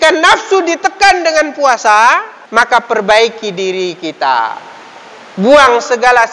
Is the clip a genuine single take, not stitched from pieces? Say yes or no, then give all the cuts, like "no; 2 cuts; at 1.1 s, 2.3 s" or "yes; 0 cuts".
no; 1 cut; at 2.4 s